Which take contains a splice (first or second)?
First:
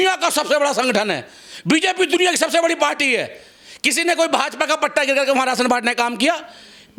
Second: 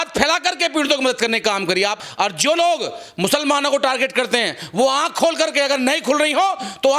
second